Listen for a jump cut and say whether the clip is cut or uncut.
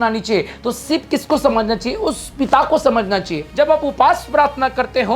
cut